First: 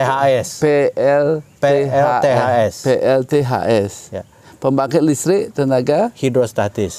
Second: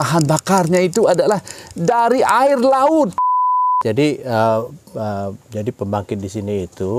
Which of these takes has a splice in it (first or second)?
second